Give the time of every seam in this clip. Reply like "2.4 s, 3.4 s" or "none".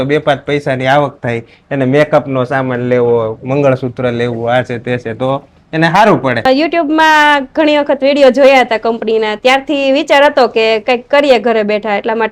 6.4 s